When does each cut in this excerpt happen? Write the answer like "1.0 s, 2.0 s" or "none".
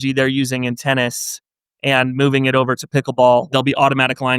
3.5 s